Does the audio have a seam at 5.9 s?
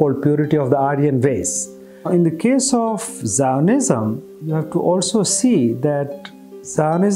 no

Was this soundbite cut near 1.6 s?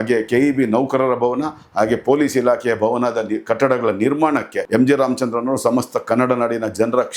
no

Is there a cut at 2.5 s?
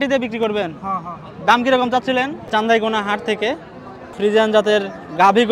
yes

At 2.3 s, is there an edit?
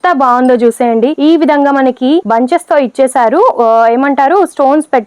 yes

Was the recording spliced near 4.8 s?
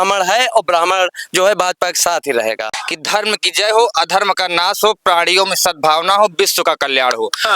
no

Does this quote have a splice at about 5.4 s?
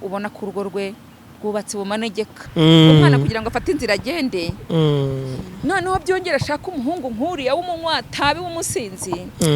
no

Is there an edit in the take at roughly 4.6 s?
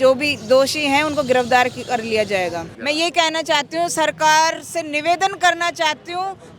no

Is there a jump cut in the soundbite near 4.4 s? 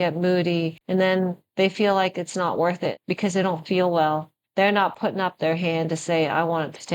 yes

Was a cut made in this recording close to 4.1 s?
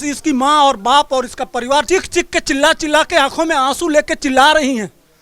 no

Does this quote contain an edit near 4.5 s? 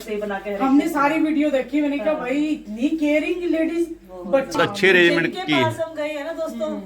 yes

